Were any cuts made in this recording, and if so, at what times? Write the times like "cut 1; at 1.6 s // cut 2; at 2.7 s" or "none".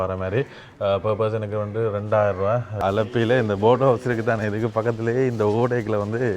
cut 1; at 2.7 s